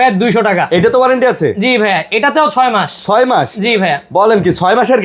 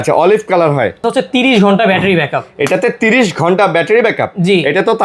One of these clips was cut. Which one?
second; 1 cut; at 1.0 s

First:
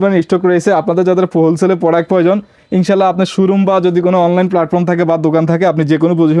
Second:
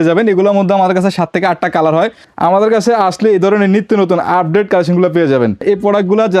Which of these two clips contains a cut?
second; 2 cuts; at 2.2 s, 5.6 s

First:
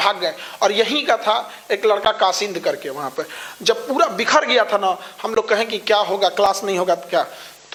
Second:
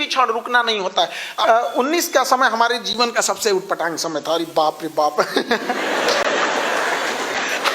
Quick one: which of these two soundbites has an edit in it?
second; 1 cut; at 1.2 s

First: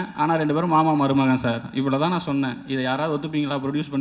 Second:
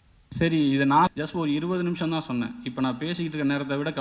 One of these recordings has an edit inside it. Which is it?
second; 1 cut; at 1.1 s

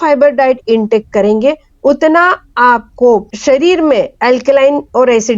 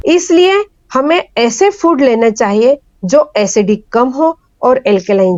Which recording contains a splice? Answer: first; 1 cut; at 3.3 s

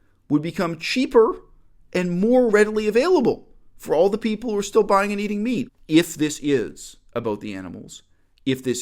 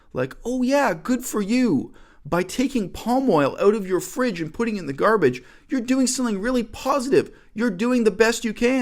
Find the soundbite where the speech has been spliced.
first; 1 cut; at 5.7 s

